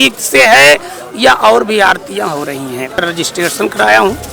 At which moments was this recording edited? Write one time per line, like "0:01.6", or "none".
0:03.0